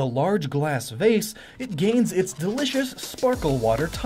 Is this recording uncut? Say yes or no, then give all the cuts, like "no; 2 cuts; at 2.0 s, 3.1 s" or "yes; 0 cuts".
no; 1 cut; at 2.3 s